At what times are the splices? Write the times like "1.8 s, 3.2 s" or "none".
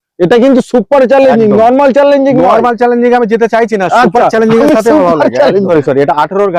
5.7 s